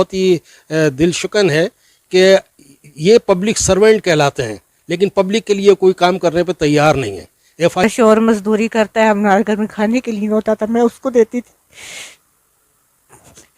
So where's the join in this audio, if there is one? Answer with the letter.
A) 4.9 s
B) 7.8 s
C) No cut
B